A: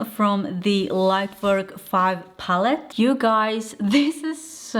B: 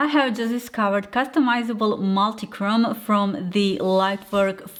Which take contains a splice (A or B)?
A